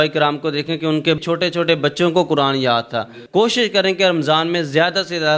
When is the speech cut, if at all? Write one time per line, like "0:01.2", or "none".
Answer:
0:01.2
0:03.2